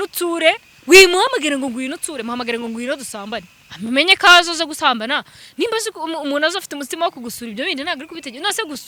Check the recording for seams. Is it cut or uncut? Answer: uncut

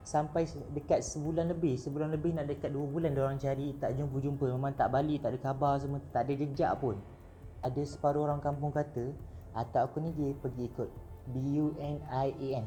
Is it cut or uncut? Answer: uncut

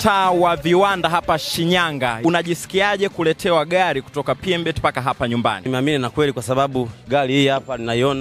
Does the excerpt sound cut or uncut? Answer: uncut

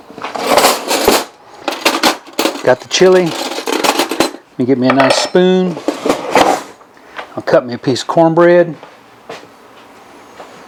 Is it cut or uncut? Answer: uncut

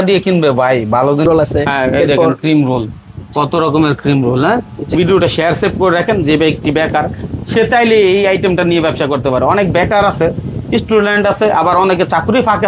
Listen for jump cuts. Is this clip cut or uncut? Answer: cut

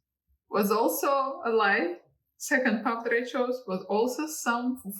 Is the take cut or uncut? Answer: uncut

